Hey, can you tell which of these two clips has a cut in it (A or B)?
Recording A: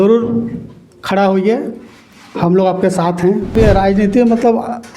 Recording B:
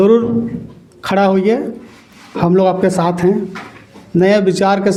A